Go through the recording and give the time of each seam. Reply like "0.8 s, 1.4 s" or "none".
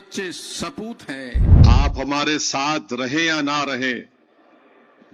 1.5 s